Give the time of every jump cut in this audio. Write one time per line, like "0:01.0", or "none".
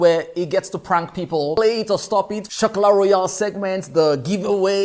0:01.6
0:02.5